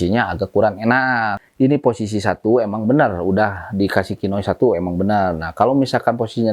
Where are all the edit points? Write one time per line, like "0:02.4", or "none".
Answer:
0:01.4